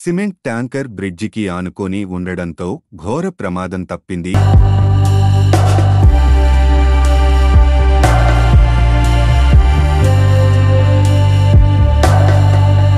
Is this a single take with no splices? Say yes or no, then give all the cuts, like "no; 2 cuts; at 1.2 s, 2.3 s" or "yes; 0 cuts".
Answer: no; 1 cut; at 4.4 s